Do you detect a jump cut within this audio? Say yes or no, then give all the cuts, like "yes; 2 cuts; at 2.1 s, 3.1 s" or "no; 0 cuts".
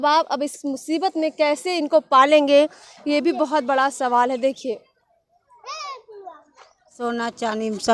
no; 0 cuts